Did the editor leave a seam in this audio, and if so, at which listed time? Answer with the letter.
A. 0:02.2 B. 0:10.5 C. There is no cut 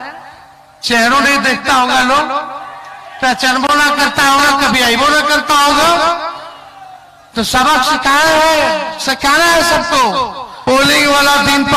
B